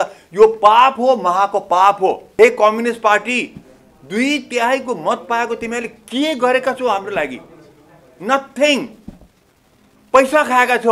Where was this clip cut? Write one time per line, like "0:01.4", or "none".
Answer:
0:02.2